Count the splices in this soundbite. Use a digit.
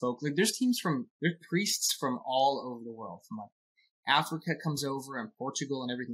0